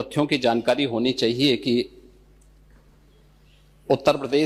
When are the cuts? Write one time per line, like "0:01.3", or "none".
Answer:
none